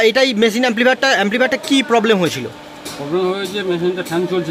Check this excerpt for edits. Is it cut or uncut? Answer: uncut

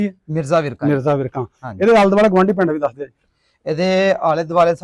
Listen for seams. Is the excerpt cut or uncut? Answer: uncut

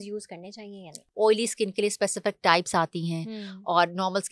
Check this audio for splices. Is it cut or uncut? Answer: cut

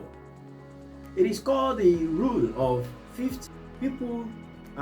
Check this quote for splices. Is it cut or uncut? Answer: cut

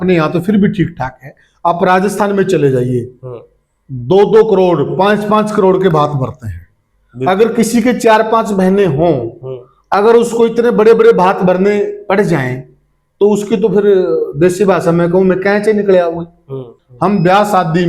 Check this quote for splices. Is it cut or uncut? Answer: cut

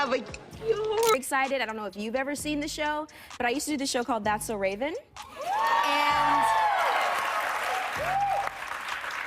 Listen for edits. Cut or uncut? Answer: cut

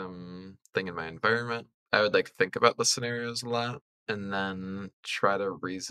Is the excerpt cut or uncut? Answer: cut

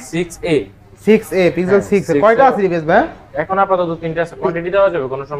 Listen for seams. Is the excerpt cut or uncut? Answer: uncut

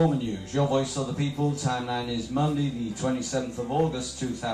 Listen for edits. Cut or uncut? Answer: uncut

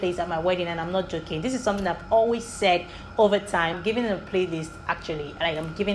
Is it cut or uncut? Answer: cut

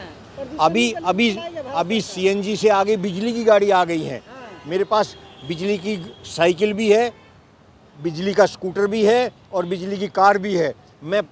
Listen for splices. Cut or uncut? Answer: uncut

